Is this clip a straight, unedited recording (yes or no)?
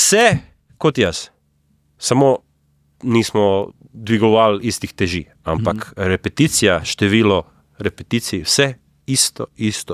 yes